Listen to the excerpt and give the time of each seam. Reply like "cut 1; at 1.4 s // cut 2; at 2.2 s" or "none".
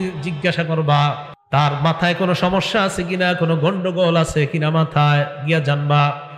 cut 1; at 1.3 s